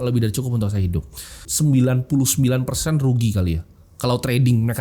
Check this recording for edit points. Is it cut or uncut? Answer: cut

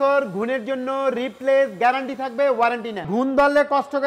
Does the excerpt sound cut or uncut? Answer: cut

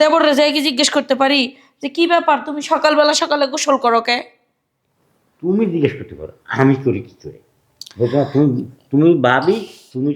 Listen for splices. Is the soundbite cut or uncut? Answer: uncut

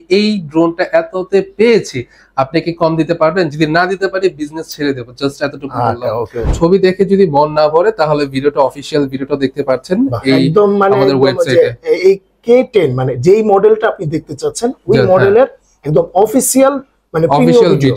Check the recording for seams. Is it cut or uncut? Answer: cut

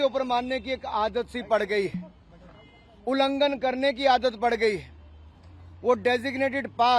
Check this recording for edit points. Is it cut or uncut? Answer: uncut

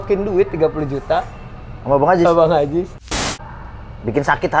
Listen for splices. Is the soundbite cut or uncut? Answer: cut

